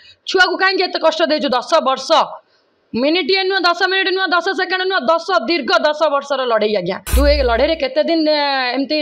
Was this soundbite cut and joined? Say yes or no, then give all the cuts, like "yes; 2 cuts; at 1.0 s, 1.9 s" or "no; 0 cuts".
yes; 1 cut; at 7.0 s